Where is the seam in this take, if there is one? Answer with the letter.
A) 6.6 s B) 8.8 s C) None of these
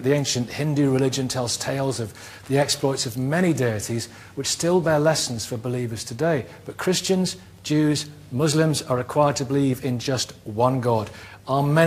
B